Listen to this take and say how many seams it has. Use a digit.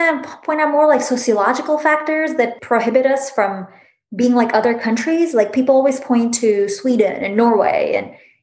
1